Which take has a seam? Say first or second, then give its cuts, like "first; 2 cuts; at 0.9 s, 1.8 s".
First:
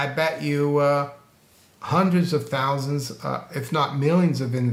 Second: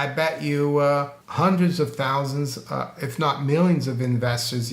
second; 1 cut; at 1.2 s